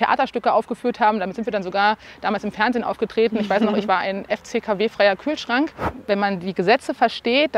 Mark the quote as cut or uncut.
cut